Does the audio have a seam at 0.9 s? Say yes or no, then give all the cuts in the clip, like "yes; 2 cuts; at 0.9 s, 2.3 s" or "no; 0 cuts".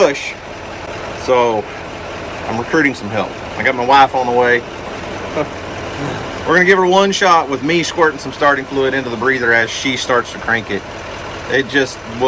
no; 0 cuts